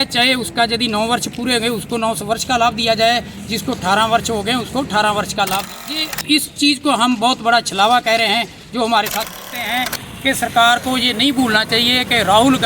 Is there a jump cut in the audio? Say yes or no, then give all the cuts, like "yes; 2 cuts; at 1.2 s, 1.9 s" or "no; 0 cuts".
yes; 2 cuts; at 5.7 s, 9.4 s